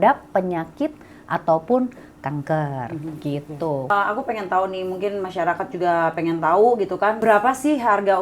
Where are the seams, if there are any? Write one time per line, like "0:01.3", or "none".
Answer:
0:03.9
0:07.2